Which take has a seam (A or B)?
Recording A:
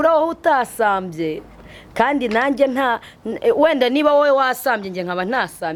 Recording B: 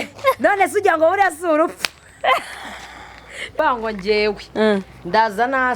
B